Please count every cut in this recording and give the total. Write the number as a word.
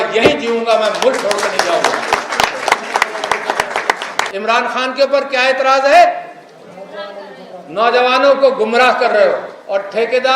one